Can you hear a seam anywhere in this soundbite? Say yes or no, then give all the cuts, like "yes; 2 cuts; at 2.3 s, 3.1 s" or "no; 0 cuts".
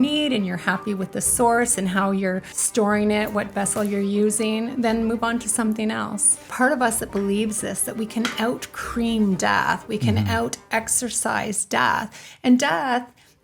yes; 2 cuts; at 2.5 s, 6.5 s